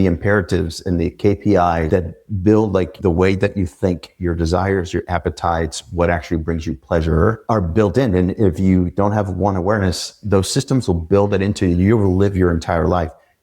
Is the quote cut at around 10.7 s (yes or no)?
no